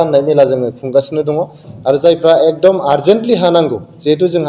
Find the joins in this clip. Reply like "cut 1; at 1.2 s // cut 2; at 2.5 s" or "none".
cut 1; at 1.6 s